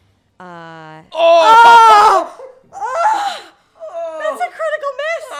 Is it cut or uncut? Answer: uncut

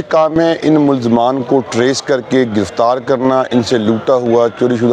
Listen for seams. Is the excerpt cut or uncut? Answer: uncut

